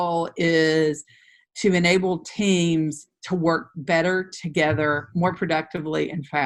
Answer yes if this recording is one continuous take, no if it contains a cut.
yes